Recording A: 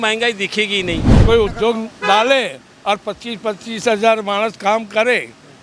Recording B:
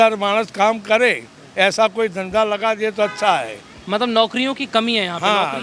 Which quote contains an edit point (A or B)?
A